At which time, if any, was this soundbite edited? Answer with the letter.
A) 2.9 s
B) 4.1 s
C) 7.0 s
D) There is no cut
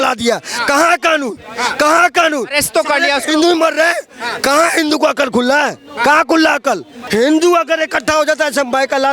C